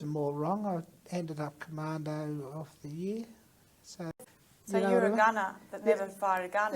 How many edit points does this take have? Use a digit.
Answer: 1